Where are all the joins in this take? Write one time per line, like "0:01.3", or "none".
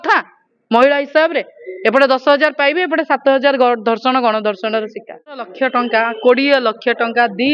0:05.5